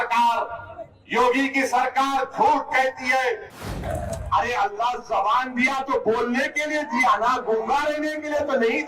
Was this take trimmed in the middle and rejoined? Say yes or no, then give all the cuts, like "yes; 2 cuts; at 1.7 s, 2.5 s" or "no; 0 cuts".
yes; 1 cut; at 3.7 s